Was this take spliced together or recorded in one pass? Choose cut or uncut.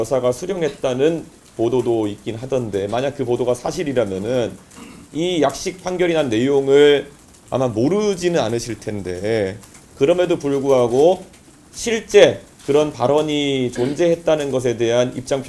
uncut